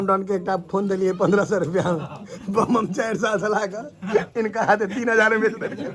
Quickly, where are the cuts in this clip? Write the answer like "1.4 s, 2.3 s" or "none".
none